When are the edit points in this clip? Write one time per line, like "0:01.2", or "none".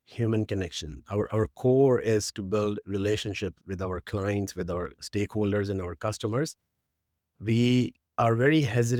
none